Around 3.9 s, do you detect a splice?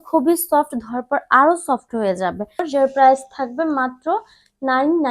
no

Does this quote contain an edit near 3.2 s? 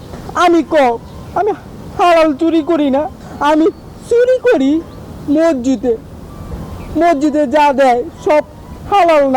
yes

